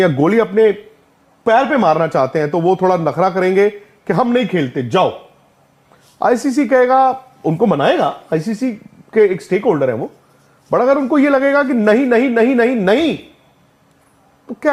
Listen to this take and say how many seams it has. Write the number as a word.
zero